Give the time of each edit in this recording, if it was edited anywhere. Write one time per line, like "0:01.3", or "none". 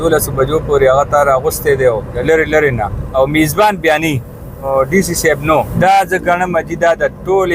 0:02.2
0:03.0
0:04.6
0:05.7